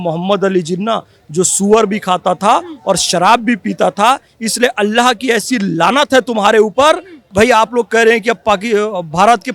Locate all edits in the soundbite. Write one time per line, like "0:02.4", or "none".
0:07.2